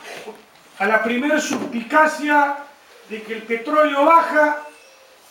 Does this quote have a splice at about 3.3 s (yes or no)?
yes